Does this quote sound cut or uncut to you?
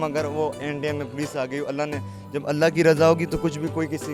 uncut